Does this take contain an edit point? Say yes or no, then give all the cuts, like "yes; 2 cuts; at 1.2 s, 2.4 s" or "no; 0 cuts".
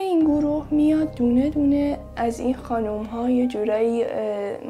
no; 0 cuts